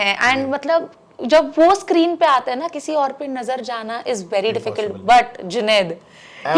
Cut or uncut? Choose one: uncut